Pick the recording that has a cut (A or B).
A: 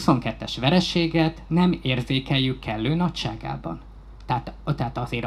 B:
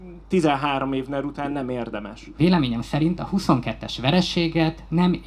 B